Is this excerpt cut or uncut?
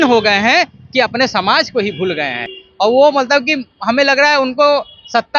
uncut